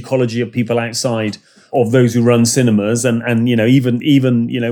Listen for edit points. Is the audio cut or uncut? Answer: uncut